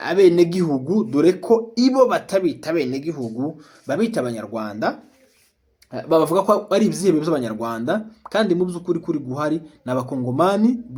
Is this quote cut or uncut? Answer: uncut